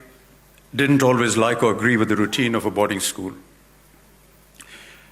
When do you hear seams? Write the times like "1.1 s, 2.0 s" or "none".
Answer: none